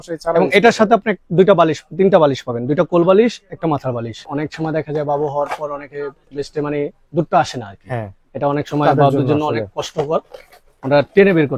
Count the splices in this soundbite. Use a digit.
1